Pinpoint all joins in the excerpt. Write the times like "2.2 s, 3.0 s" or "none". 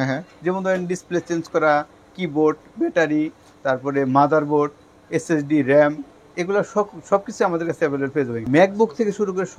8.4 s